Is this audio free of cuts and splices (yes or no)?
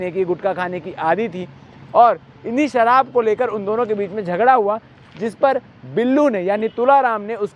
yes